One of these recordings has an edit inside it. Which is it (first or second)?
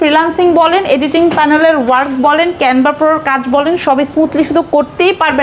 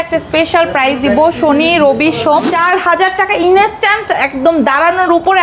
second